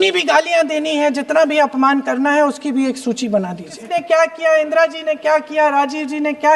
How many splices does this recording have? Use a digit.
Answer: 1